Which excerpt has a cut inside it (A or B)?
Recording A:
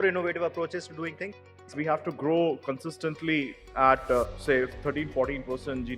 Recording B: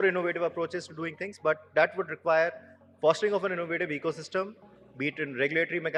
A